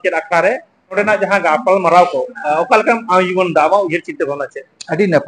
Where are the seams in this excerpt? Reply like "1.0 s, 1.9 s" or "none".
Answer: 0.9 s

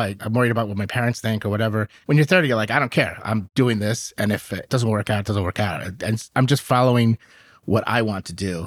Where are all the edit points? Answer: 1.9 s, 4.7 s

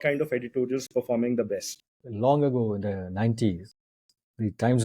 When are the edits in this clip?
1.9 s

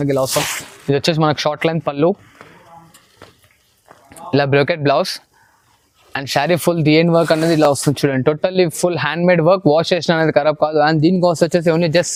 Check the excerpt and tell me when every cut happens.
none

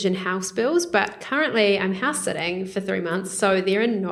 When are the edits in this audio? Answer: none

